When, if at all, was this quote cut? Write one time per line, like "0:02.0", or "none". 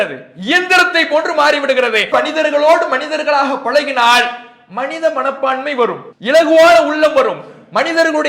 0:06.1